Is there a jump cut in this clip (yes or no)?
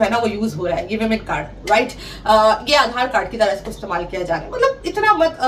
no